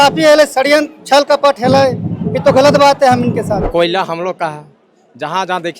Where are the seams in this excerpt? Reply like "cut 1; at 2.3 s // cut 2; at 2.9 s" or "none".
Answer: cut 1; at 3.7 s